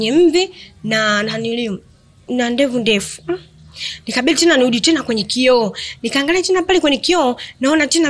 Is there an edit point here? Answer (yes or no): no